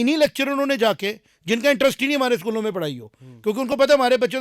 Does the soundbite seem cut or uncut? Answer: uncut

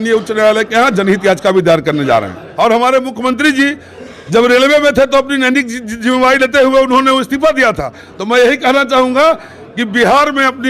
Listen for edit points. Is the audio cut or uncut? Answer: cut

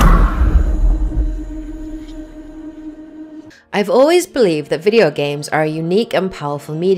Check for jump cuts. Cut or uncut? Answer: uncut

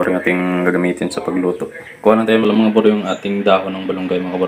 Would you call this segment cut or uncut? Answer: cut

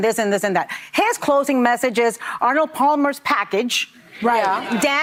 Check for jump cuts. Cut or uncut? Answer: uncut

